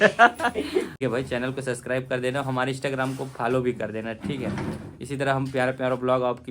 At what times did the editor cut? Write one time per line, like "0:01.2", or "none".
0:00.9